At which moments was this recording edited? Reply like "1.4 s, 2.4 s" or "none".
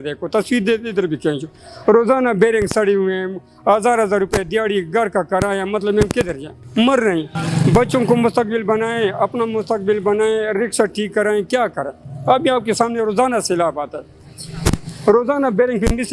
none